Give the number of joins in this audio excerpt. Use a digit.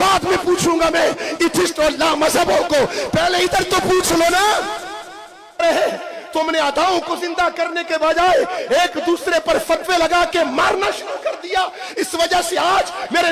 1